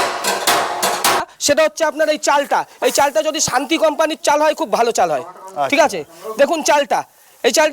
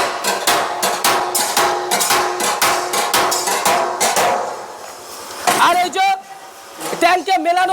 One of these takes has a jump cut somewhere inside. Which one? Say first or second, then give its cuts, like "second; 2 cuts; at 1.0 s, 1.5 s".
first; 1 cut; at 1.2 s